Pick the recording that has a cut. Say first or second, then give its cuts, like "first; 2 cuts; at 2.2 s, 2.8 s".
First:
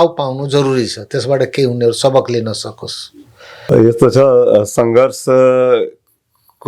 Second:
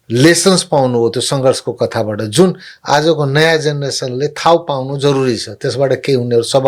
first; 1 cut; at 3.7 s